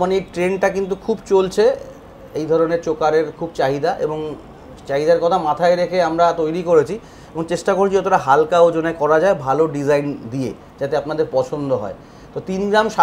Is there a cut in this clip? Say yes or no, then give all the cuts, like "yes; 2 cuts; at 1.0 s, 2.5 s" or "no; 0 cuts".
no; 0 cuts